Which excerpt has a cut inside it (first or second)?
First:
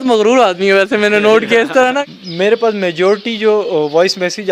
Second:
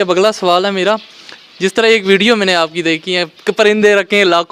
first